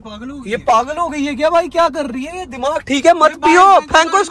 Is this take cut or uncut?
uncut